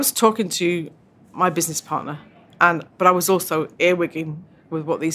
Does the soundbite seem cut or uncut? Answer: uncut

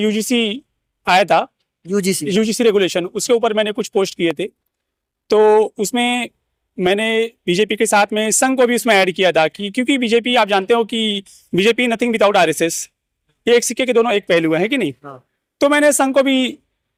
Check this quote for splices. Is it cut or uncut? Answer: uncut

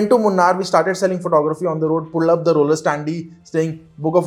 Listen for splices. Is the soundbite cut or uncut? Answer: uncut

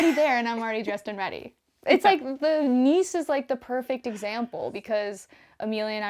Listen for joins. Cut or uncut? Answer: uncut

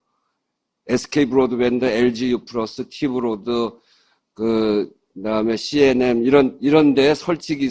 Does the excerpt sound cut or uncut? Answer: uncut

